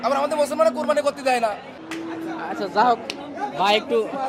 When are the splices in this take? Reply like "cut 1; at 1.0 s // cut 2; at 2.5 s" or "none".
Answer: none